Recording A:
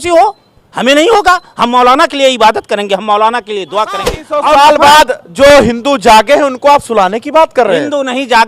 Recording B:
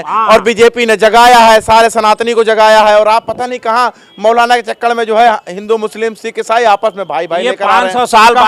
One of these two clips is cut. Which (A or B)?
A